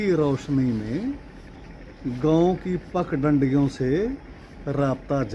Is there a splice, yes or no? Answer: no